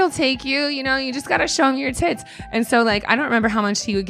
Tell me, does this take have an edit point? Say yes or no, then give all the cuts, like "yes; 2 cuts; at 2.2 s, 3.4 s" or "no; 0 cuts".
no; 0 cuts